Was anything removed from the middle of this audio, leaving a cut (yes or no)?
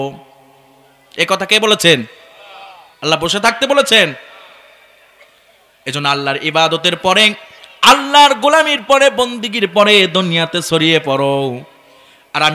no